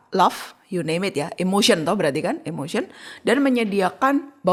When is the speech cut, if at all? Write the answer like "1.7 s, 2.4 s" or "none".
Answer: none